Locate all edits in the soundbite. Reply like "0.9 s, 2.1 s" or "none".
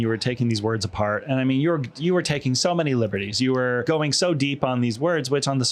3.8 s